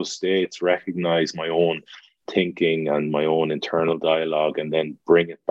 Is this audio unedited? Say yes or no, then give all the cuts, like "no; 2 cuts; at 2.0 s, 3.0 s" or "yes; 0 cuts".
no; 1 cut; at 2.2 s